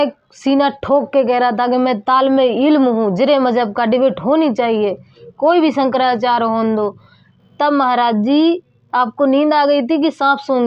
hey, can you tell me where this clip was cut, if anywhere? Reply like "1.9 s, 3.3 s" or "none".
none